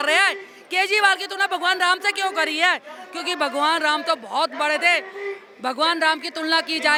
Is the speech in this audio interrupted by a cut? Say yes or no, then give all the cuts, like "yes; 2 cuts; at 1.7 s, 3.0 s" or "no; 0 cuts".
no; 0 cuts